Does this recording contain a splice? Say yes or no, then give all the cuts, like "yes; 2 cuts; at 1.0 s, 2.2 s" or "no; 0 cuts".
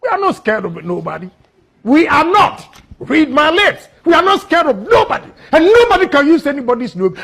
no; 0 cuts